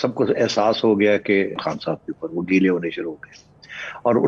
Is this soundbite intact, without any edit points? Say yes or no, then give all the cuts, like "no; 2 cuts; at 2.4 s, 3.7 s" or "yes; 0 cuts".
no; 1 cut; at 1.5 s